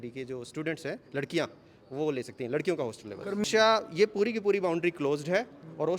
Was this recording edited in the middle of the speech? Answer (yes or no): yes